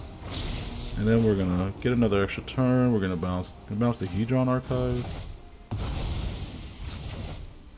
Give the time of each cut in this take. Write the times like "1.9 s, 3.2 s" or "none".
3.5 s